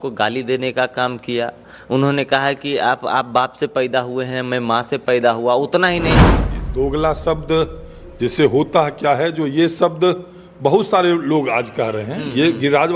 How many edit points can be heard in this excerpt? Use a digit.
1